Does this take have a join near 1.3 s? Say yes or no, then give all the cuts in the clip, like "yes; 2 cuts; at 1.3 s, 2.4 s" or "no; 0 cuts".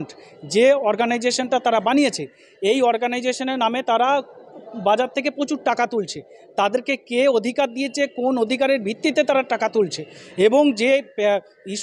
yes; 1 cut; at 1.3 s